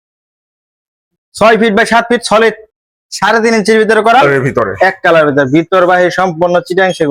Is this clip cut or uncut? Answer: cut